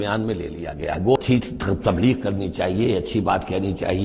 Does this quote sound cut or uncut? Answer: cut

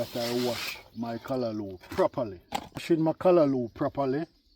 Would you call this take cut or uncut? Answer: cut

